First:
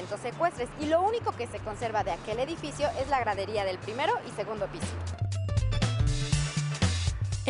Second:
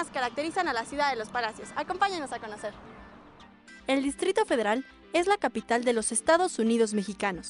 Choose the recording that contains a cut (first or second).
second